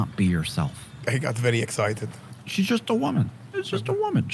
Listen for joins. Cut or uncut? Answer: cut